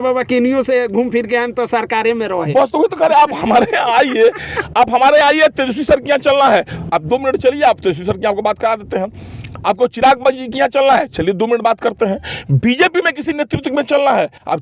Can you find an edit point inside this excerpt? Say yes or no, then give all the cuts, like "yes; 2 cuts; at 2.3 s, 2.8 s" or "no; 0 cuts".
no; 0 cuts